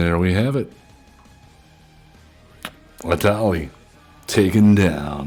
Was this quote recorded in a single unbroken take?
yes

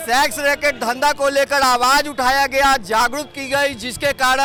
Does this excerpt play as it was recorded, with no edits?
yes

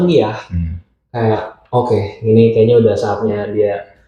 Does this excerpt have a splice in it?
no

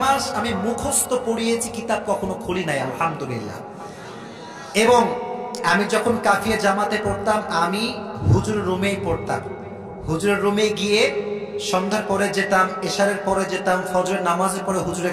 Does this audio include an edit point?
no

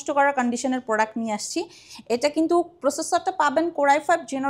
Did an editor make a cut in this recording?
no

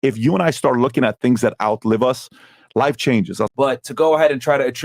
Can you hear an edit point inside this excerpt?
yes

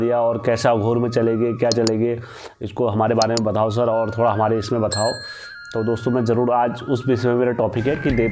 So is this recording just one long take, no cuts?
yes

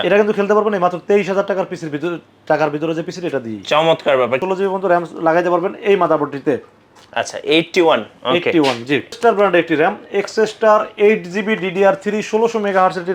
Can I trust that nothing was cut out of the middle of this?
no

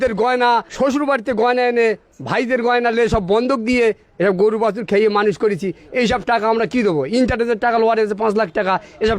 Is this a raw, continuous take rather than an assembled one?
yes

